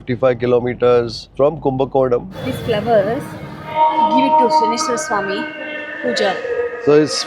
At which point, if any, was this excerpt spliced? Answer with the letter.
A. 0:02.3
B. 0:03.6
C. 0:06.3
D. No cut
A